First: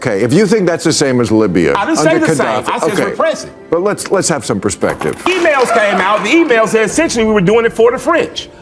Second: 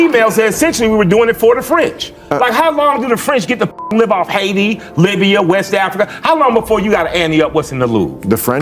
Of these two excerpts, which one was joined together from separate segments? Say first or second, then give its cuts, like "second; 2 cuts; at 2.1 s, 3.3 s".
first; 1 cut; at 5.2 s